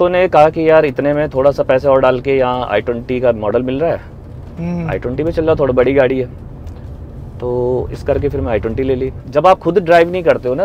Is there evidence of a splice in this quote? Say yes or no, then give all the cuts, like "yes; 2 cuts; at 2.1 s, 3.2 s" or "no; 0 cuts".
no; 0 cuts